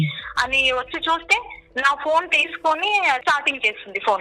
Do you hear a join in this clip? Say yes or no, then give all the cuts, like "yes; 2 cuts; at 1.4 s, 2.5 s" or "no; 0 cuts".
yes; 1 cut; at 3.2 s